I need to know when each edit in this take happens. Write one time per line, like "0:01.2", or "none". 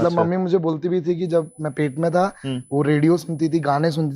none